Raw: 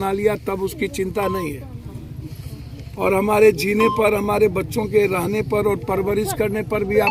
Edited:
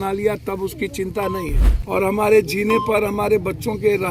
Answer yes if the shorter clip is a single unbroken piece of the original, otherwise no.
no